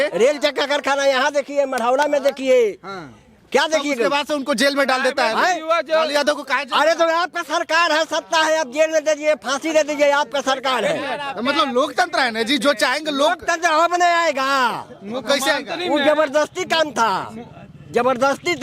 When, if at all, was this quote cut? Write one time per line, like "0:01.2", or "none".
none